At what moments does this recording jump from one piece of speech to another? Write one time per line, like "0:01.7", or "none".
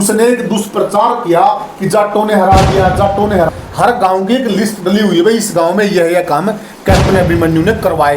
0:03.5